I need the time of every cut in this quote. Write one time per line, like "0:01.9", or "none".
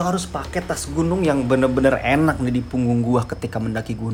none